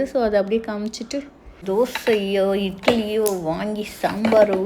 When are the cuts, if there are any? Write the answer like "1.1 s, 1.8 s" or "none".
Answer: 1.6 s